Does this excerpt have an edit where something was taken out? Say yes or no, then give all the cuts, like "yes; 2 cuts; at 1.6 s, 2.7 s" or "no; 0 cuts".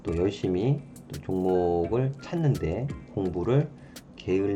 no; 0 cuts